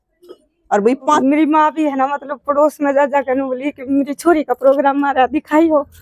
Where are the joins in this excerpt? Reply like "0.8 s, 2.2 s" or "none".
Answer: 1.0 s